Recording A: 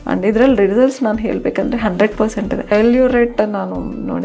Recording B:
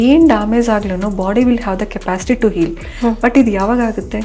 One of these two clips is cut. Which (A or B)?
A